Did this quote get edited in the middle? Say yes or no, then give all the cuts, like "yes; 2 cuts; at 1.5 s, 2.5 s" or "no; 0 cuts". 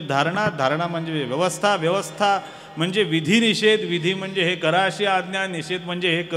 no; 0 cuts